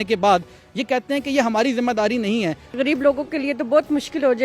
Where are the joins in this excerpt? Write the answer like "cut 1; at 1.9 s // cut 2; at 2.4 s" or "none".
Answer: cut 1; at 2.8 s